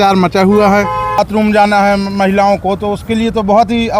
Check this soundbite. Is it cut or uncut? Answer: cut